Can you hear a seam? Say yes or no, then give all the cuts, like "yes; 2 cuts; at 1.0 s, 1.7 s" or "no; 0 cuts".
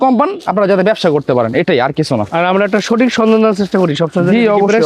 no; 0 cuts